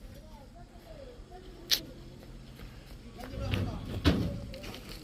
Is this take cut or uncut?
uncut